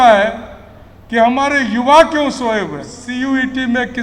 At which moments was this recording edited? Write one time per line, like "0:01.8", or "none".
0:03.0